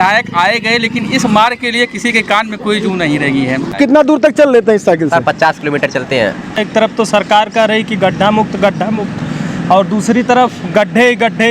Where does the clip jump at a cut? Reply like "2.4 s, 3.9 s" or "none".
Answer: 3.8 s, 6.6 s